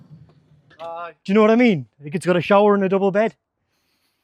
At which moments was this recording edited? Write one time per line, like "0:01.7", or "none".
none